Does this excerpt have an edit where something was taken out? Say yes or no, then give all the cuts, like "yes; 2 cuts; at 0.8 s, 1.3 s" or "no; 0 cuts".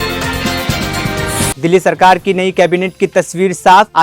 yes; 1 cut; at 1.5 s